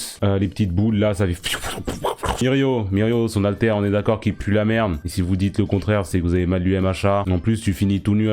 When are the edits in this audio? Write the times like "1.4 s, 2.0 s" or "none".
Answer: 2.4 s, 7.2 s

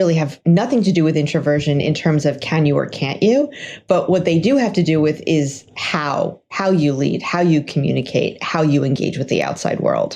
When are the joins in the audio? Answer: none

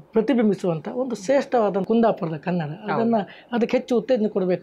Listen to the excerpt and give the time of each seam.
1.8 s

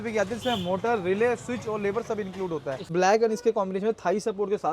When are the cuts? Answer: 2.9 s

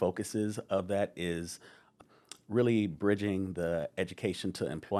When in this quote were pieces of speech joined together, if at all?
none

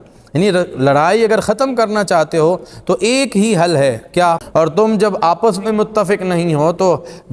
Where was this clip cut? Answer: 4.4 s

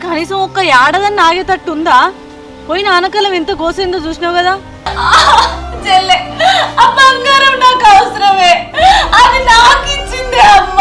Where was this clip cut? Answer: 4.9 s

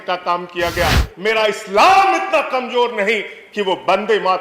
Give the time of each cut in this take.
1.1 s

